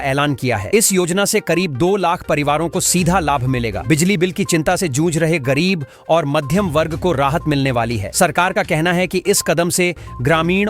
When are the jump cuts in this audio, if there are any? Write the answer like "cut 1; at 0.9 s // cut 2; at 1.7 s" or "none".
none